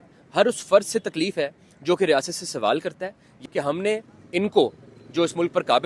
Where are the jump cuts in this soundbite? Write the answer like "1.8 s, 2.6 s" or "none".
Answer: 3.3 s

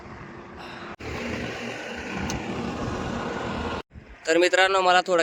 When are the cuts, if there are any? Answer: none

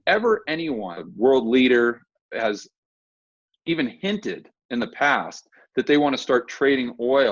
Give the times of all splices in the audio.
1.0 s

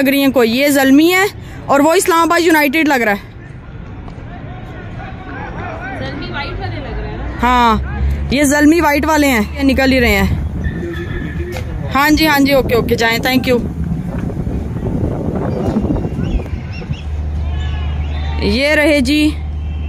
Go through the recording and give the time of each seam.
none

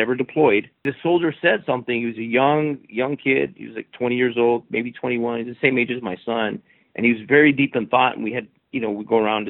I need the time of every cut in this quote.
0.9 s

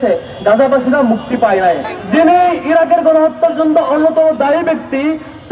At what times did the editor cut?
1.9 s

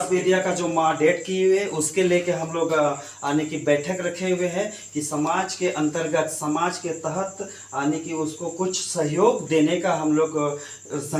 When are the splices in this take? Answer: none

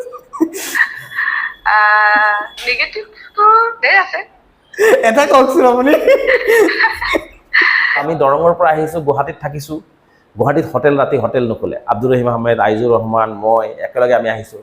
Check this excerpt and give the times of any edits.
8.0 s

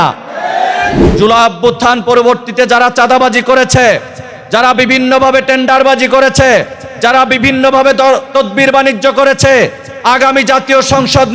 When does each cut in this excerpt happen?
1.0 s

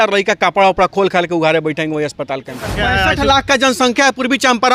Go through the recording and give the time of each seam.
2.6 s

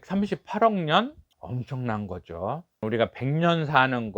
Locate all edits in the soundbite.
2.8 s

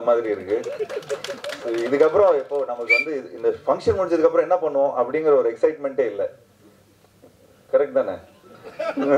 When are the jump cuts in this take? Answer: none

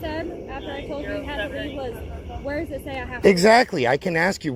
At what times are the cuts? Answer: none

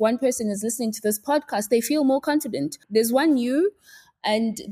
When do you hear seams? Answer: 2.8 s

